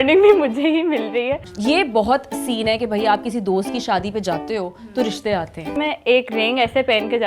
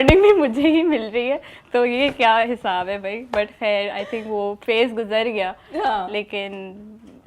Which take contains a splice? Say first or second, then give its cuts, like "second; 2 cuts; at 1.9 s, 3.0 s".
first; 2 cuts; at 1.5 s, 5.7 s